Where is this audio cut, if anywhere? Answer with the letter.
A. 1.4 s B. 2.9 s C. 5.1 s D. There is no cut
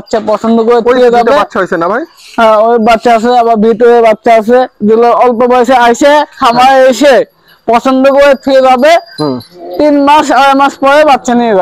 D